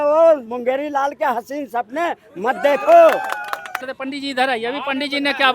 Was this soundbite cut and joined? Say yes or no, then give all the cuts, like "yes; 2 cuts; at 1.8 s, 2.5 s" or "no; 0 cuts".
yes; 1 cut; at 3.8 s